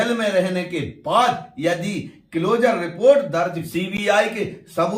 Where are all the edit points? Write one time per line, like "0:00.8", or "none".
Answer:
0:03.9

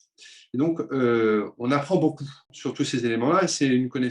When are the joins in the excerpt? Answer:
0:02.5

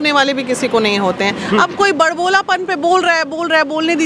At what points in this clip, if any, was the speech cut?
none

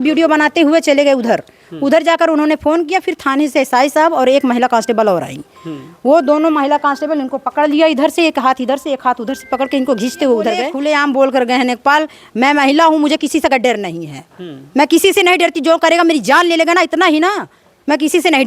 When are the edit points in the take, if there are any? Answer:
0:10.7

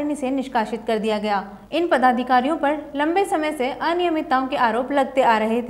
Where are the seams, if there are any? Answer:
0:01.6

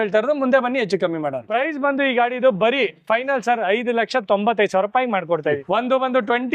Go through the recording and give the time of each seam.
0:01.4
0:05.6

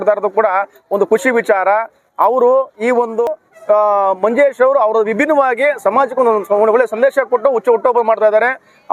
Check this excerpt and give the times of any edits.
0:03.3

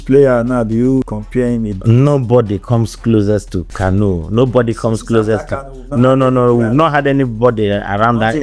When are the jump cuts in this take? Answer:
0:01.1
0:03.6

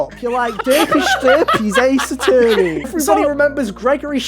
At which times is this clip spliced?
0:02.9

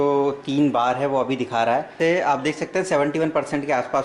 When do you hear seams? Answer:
0:01.9

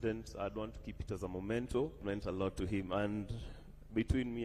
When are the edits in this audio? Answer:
0:02.0

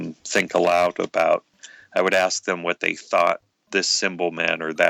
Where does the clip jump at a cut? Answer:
none

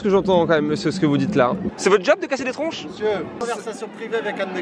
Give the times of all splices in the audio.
0:01.7

